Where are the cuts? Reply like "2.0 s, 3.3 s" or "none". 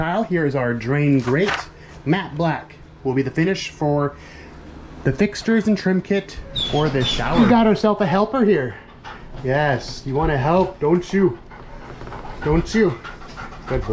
7.4 s